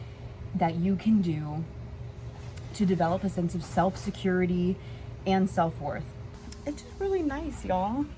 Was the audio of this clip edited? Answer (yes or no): yes